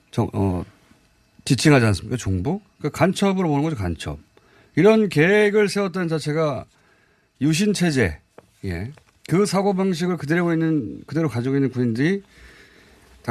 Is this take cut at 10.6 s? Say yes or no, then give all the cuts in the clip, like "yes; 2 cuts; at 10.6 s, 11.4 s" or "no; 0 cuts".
no; 0 cuts